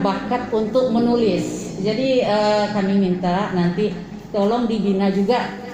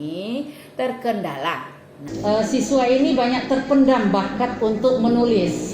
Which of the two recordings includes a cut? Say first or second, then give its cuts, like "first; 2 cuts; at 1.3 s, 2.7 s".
second; 1 cut; at 2.0 s